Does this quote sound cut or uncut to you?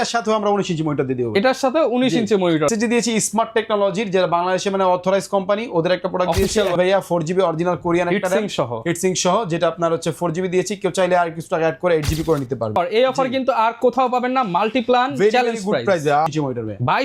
cut